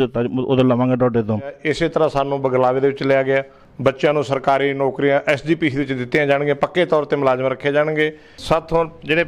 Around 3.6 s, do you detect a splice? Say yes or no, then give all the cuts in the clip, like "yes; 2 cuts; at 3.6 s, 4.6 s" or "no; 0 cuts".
yes; 3 cuts; at 1.6 s, 3.6 s, 8.3 s